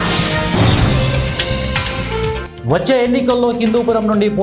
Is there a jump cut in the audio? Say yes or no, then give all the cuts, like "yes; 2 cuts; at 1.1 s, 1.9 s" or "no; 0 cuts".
yes; 1 cut; at 2.5 s